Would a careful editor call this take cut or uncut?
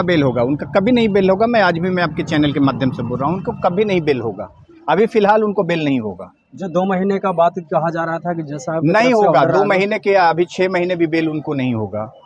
uncut